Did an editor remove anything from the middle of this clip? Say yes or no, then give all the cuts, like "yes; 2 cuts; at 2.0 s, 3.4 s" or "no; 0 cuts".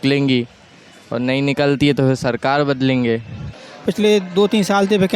yes; 1 cut; at 3.5 s